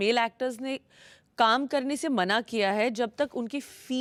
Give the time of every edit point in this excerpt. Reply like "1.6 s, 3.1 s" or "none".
none